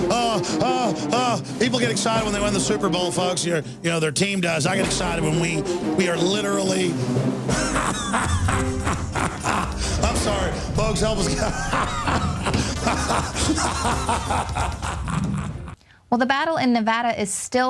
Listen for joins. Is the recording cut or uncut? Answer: cut